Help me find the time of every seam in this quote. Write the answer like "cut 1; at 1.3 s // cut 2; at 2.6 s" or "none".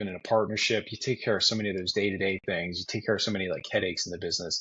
none